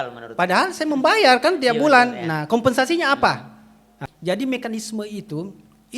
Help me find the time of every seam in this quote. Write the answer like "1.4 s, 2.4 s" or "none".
4.0 s